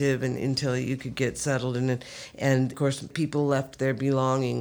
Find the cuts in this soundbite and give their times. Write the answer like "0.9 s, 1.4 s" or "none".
2.8 s